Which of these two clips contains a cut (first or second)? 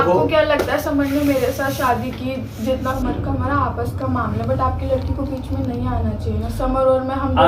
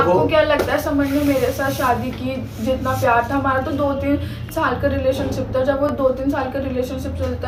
first